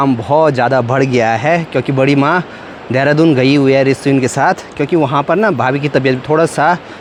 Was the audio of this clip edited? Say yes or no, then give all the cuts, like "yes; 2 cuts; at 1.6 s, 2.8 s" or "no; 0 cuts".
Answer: no; 0 cuts